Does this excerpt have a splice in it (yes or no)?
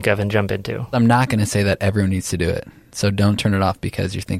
yes